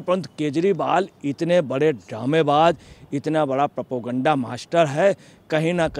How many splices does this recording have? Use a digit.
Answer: 0